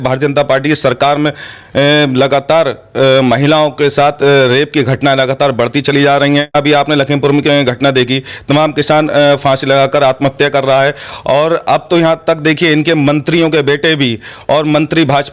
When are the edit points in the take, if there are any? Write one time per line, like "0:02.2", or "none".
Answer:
0:06.5